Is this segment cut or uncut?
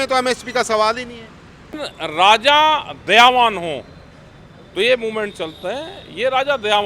cut